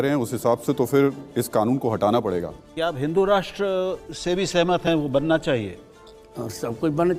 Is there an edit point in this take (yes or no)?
no